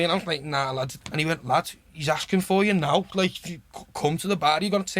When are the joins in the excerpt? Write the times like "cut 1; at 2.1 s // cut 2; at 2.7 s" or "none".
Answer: cut 1; at 1.0 s